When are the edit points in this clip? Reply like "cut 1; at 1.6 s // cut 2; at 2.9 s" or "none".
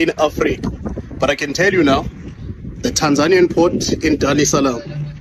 none